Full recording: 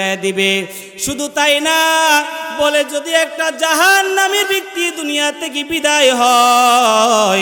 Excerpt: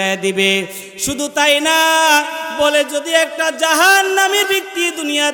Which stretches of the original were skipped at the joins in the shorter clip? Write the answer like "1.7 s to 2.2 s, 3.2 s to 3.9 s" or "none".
none